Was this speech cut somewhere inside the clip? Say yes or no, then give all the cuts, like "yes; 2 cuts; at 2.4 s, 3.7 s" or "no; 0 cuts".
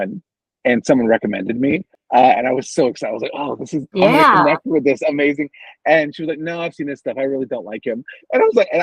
yes; 1 cut; at 1.9 s